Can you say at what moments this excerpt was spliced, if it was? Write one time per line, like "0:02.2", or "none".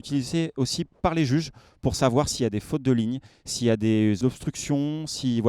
0:04.2